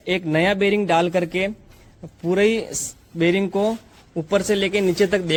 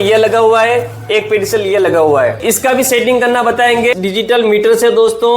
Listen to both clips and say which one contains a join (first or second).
second